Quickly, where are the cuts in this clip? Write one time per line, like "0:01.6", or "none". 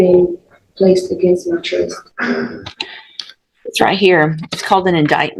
none